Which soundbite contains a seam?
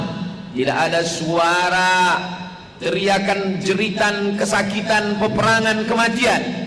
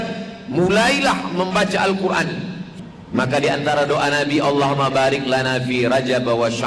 second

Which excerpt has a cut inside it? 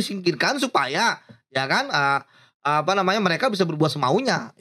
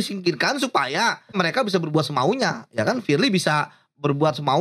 second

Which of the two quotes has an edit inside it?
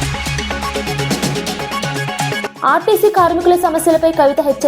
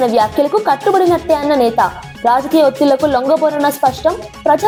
first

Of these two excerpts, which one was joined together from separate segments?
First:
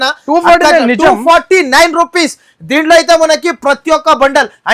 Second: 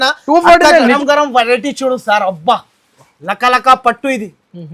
second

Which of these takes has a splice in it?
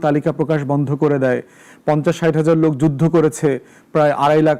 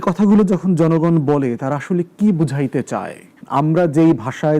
second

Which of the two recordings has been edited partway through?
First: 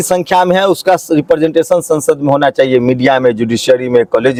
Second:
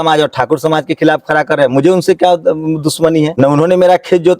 second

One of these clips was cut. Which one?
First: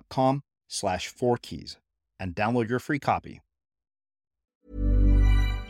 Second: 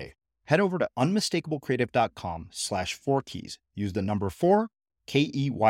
first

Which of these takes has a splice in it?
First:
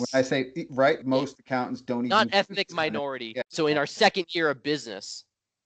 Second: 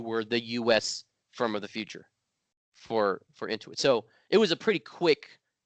first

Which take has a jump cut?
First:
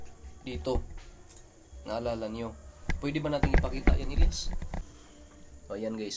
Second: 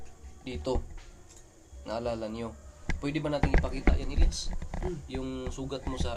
first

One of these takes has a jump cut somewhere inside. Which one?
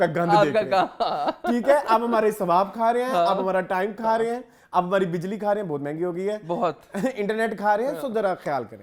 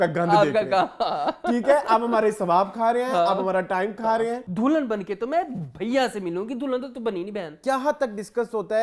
second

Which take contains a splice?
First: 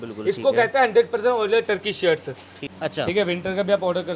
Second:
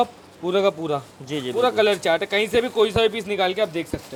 first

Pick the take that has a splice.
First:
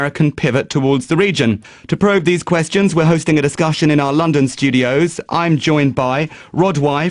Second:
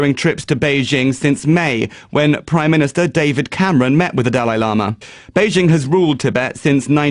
second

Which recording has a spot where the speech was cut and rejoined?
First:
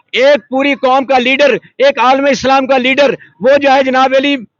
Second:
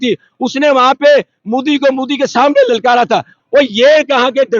second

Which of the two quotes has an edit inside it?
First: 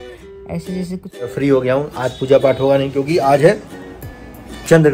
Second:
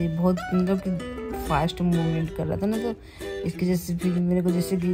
first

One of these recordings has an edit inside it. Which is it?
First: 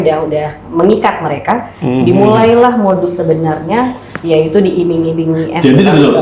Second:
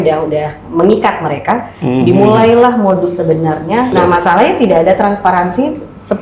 second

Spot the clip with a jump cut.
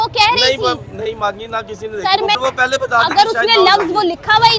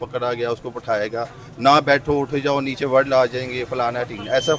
first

